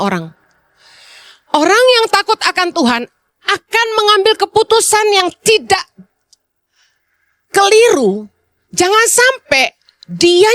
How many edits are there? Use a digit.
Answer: 0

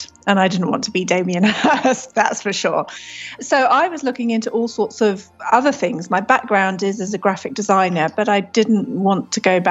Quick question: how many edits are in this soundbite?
1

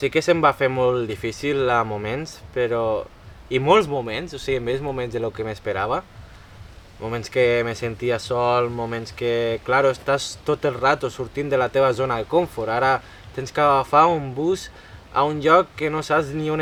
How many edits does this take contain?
0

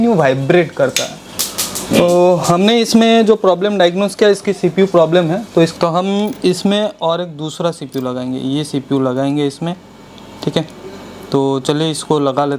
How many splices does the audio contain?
1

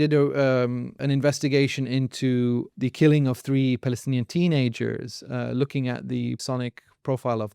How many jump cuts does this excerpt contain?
3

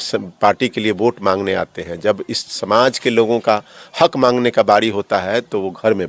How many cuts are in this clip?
0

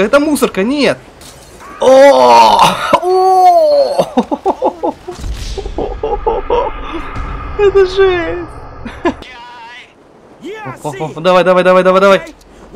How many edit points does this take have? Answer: 1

